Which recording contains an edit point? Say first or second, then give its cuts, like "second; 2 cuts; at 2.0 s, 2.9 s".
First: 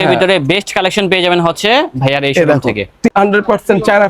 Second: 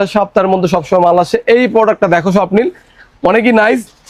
first; 1 cut; at 3.1 s